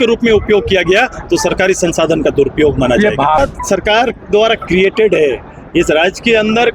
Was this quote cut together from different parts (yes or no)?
yes